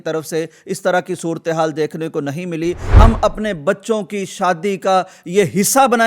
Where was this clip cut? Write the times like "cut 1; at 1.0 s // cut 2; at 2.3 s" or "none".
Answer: cut 1; at 2.9 s

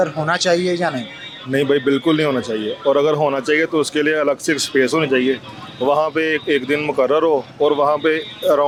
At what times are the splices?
none

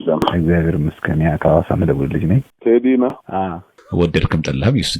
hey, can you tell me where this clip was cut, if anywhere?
cut 1; at 2.5 s // cut 2; at 3.9 s

